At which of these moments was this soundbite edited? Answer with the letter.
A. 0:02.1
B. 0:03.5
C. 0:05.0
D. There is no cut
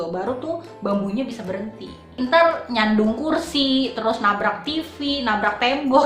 A